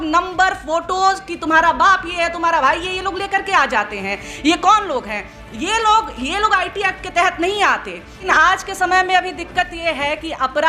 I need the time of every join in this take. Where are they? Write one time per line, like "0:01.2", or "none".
0:08.2